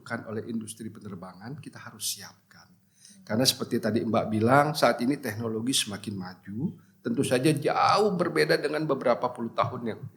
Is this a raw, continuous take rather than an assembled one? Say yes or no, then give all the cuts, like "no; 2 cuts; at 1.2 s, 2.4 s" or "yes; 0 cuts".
yes; 0 cuts